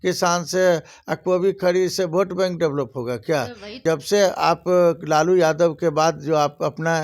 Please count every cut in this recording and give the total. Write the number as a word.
one